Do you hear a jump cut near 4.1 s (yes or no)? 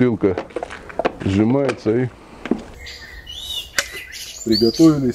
no